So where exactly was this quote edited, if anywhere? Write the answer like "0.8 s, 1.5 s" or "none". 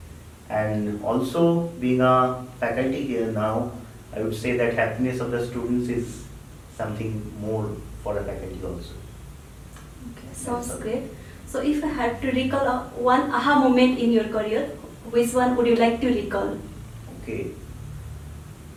none